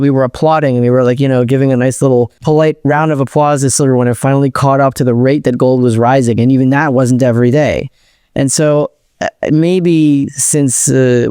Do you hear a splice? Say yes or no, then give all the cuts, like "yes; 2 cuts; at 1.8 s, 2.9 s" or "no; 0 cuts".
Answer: yes; 1 cut; at 2.4 s